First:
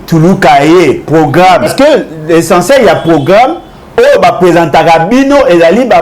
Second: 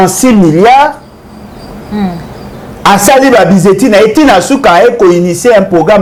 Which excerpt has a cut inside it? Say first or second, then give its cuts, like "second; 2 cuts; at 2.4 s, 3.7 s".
first; 1 cut; at 1.7 s